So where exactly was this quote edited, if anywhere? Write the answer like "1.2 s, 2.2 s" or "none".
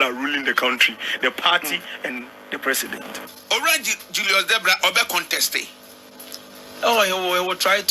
3.3 s